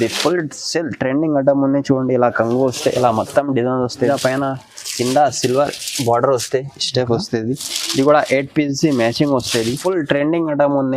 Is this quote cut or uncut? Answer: cut